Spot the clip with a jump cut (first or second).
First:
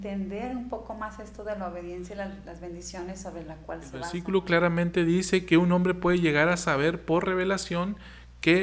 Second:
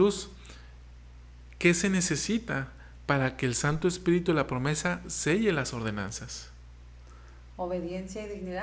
first